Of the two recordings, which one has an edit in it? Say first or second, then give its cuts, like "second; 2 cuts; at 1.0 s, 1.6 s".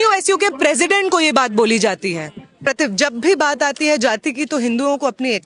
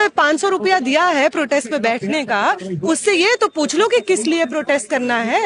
first; 1 cut; at 2.6 s